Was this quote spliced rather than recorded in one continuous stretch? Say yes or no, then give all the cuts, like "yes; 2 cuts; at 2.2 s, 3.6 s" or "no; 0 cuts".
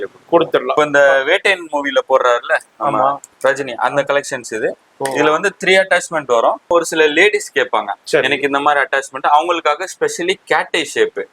yes; 3 cuts; at 0.7 s, 3.2 s, 6.7 s